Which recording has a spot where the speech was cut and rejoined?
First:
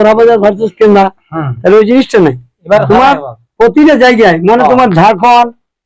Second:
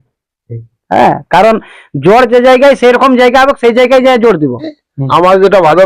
second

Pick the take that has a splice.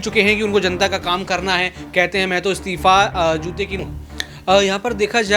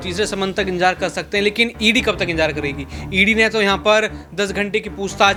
first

